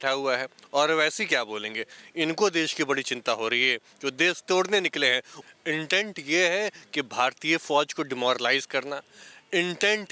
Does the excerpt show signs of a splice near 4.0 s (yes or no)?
no